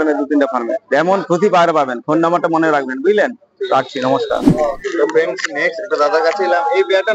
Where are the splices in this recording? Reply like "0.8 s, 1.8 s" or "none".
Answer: 4.5 s

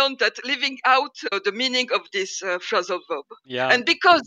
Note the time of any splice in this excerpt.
1.3 s, 3.4 s

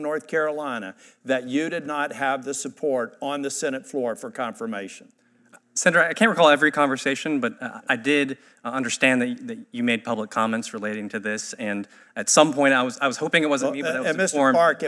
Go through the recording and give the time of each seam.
none

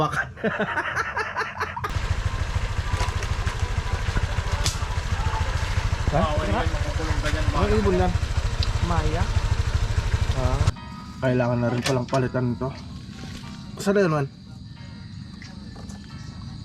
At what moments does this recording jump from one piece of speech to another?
2.0 s, 10.7 s

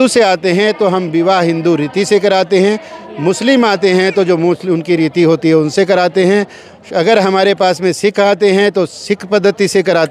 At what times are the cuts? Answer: none

